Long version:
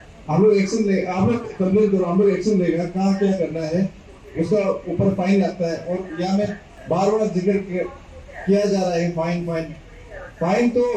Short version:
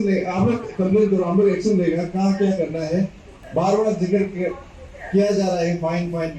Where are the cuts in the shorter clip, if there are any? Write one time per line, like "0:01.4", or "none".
0:03.3